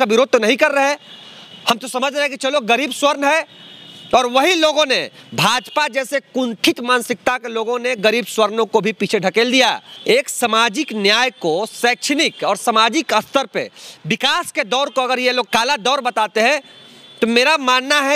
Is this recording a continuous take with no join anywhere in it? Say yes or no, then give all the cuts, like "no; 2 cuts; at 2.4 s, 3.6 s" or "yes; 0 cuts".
no; 2 cuts; at 9.9 s, 15.5 s